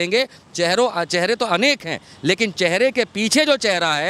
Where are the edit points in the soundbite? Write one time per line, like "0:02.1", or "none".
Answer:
none